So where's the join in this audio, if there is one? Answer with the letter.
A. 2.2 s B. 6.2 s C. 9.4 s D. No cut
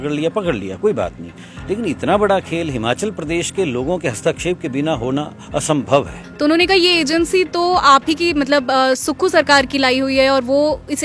B